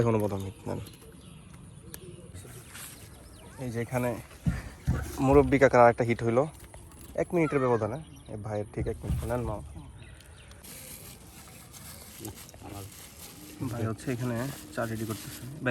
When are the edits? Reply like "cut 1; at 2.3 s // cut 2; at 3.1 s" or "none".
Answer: cut 1; at 2.3 s // cut 2; at 10.6 s